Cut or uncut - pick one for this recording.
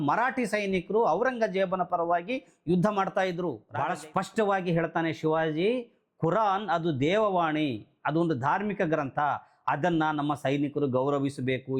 cut